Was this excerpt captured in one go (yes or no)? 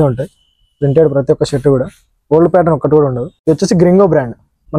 yes